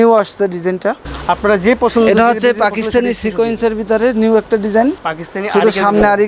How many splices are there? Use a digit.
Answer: 2